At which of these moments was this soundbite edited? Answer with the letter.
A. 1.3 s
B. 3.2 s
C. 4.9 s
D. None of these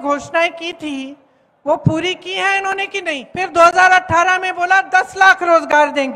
B